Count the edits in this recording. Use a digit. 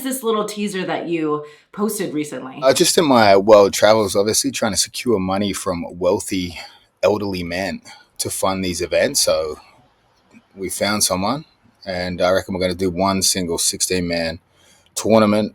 1